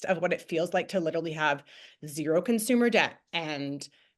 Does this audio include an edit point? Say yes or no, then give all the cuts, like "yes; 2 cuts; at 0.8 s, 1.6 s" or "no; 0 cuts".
no; 0 cuts